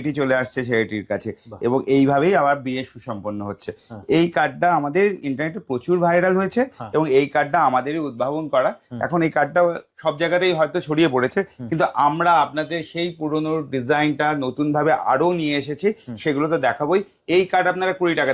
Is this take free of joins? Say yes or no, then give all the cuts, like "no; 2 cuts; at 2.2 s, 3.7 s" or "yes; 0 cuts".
yes; 0 cuts